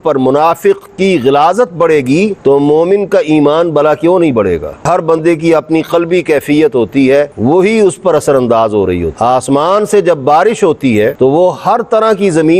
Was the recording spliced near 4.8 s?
yes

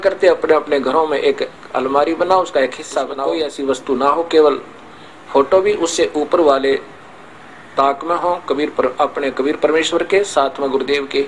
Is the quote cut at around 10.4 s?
no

